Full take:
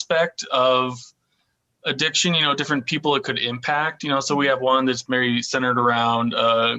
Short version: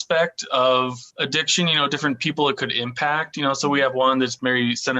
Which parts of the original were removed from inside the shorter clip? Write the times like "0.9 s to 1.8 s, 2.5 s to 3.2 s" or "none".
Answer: 1.0 s to 1.7 s